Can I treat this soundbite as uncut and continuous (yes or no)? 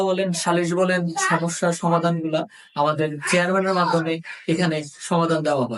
yes